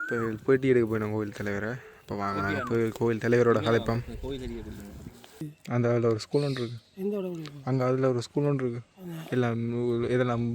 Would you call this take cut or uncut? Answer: cut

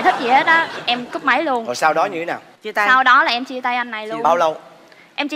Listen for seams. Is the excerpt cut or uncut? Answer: uncut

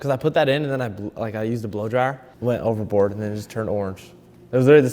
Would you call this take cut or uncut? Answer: cut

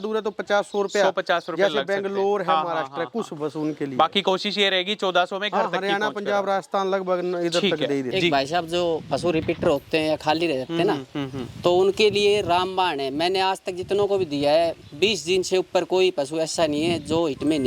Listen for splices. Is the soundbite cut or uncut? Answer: cut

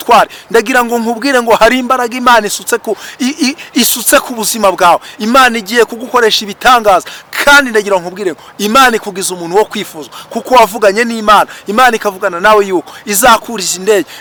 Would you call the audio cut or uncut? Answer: uncut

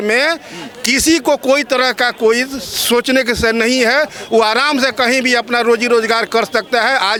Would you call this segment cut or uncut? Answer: uncut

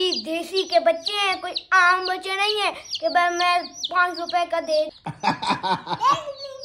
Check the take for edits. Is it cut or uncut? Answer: cut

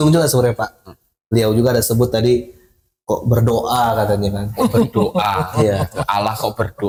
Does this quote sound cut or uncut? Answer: uncut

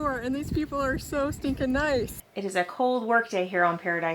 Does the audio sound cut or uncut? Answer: cut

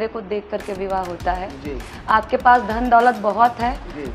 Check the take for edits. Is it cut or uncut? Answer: uncut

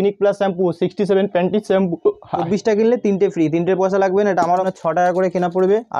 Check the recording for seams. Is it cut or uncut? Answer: cut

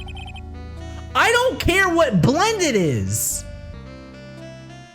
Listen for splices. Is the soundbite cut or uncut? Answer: cut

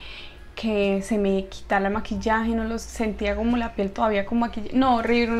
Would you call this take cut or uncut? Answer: uncut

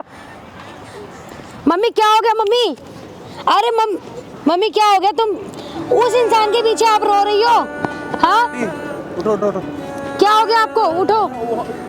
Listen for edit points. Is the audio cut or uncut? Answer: cut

